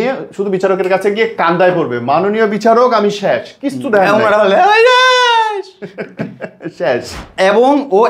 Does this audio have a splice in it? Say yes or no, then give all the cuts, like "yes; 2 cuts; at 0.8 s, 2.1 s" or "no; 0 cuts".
yes; 1 cut; at 7.2 s